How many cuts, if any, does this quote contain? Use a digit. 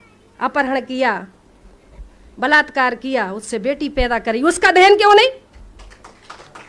0